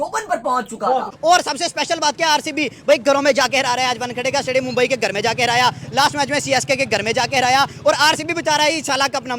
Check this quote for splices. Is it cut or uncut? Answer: cut